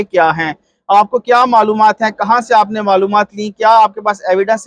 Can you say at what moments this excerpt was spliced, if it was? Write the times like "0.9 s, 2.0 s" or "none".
none

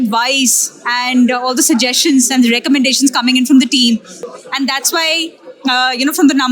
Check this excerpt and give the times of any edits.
4.2 s

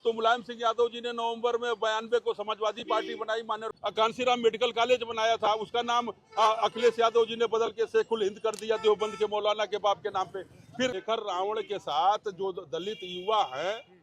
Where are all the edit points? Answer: 3.7 s, 10.9 s

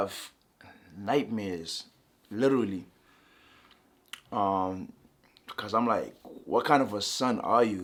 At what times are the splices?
none

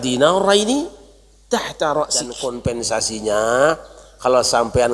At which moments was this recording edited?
2.3 s

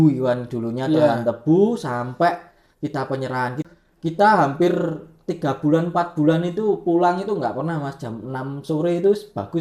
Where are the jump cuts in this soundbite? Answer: 3.6 s

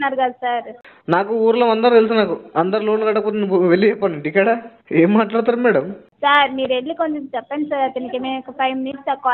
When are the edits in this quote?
6.0 s

